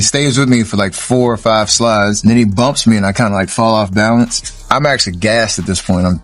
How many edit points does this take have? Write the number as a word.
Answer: two